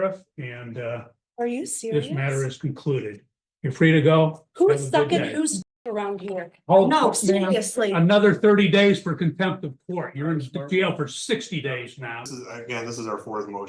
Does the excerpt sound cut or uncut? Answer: cut